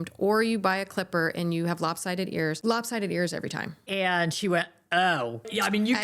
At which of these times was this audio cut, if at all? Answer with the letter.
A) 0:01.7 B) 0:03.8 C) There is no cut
B